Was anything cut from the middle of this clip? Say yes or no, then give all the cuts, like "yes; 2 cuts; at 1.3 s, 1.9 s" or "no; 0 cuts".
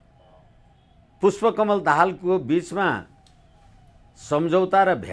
no; 0 cuts